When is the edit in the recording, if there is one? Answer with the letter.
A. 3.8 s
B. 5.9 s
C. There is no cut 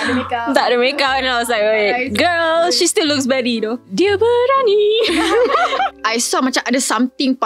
B